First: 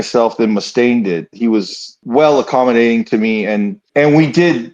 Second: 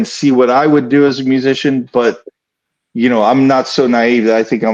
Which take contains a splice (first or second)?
first